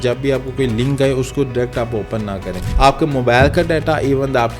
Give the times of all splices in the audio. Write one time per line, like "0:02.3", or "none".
0:02.6